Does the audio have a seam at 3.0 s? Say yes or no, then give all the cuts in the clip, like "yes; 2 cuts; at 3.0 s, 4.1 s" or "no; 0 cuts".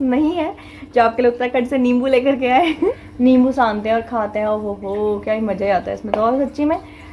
yes; 1 cut; at 3.0 s